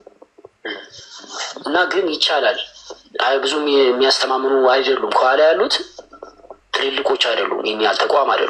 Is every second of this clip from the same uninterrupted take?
yes; 0 cuts

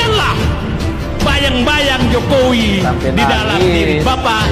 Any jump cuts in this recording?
no; 0 cuts

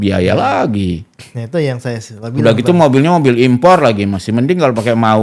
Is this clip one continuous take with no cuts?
yes; 0 cuts

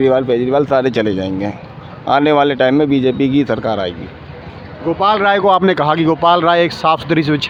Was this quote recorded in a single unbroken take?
yes; 0 cuts

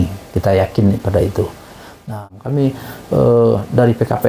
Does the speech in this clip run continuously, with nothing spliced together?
no; 1 cut; at 2.3 s

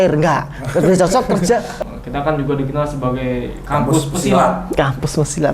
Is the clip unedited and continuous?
no; 1 cut; at 1.7 s

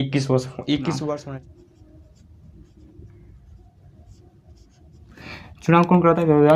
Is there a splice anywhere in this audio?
yes; 1 cut; at 1.3 s

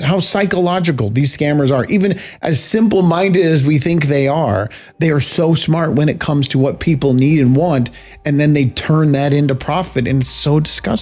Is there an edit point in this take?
no; 0 cuts

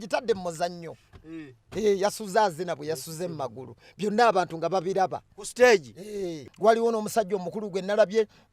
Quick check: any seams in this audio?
yes; 1 cut; at 6.4 s

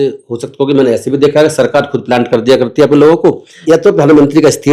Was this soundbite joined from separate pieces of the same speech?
yes; 1 cut; at 3.5 s

